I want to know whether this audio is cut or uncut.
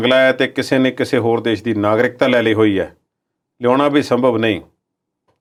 uncut